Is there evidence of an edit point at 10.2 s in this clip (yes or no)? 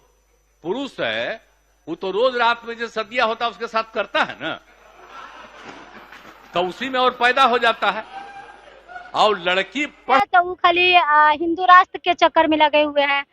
yes